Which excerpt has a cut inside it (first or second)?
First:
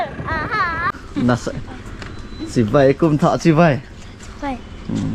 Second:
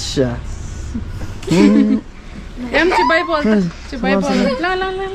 first